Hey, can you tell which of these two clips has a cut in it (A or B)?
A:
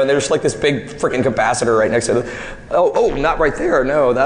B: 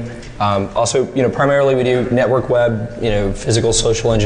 A